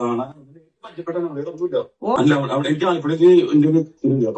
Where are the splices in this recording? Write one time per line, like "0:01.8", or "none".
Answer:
0:02.2